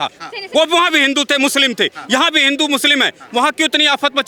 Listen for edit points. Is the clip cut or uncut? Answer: uncut